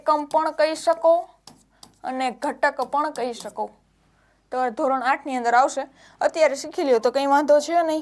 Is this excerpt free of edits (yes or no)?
yes